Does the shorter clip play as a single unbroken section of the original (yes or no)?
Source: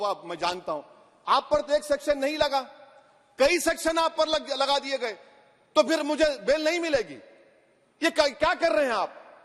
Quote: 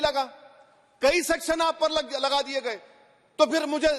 yes